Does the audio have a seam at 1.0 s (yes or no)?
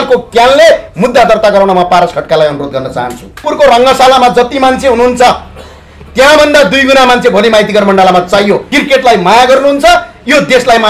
no